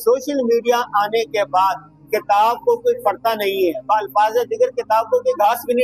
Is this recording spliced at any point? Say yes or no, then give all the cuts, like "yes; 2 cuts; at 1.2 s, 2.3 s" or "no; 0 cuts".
no; 0 cuts